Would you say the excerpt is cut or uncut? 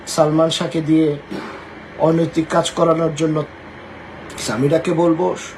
cut